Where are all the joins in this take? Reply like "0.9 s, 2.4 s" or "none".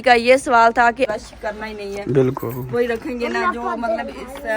1.1 s